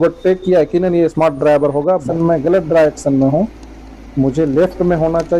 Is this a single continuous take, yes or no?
no